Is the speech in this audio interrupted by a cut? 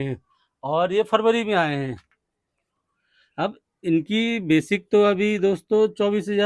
no; 0 cuts

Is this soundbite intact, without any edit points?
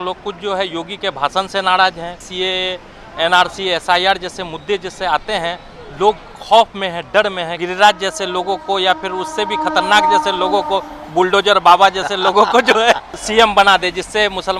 no; 3 cuts; at 2.2 s, 7.6 s, 13.1 s

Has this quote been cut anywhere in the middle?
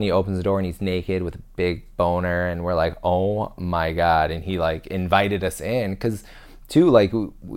no; 0 cuts

